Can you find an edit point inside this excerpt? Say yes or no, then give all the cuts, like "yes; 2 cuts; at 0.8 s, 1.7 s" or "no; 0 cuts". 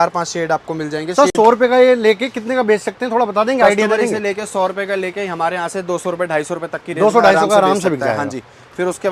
no; 0 cuts